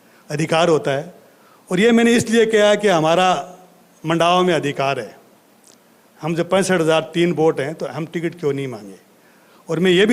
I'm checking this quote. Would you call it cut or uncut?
uncut